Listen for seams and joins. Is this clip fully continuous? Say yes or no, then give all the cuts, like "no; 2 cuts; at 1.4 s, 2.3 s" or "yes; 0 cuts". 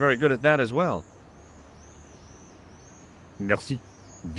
no; 2 cuts; at 1.0 s, 3.4 s